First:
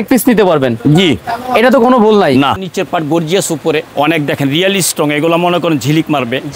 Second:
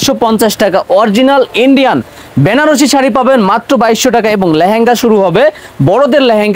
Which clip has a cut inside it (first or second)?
first